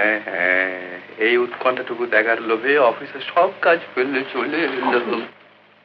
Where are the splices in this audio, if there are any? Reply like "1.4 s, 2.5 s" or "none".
none